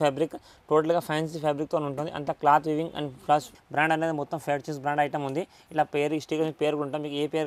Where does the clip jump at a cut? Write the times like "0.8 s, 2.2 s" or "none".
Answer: 3.6 s